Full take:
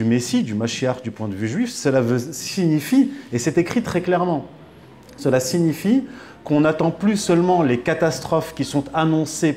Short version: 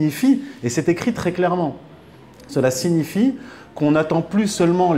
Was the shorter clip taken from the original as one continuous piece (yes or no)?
yes